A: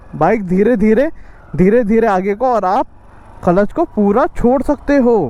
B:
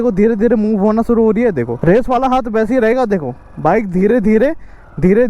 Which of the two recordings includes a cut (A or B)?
B